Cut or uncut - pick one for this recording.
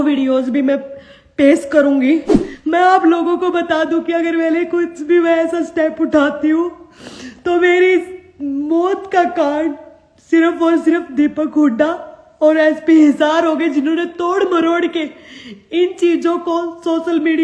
cut